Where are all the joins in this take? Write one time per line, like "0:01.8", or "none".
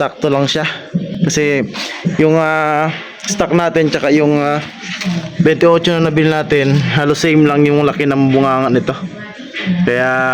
0:01.1